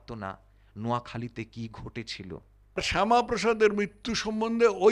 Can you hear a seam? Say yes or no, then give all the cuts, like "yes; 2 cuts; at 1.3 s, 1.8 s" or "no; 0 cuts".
yes; 1 cut; at 2.8 s